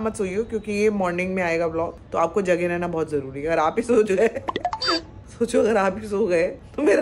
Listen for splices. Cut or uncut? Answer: uncut